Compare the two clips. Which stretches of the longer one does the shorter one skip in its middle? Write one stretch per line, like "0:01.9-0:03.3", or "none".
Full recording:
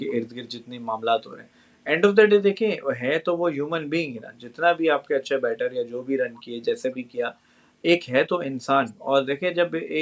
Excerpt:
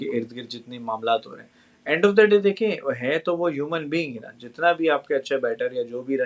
none